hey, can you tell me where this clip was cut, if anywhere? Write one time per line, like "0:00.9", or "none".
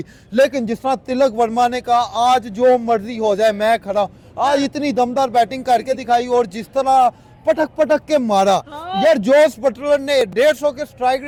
none